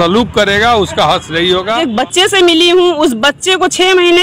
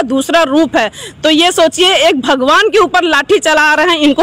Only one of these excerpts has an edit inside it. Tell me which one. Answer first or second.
first